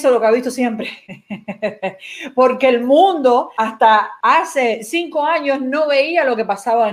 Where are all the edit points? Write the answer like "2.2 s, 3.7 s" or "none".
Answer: 3.9 s